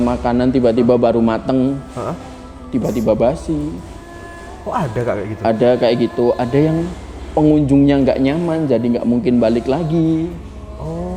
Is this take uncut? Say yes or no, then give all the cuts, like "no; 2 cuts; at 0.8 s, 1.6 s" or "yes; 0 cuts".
yes; 0 cuts